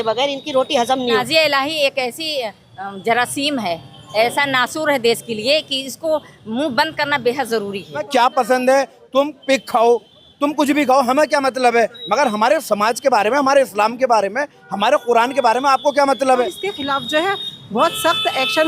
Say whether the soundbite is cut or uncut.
cut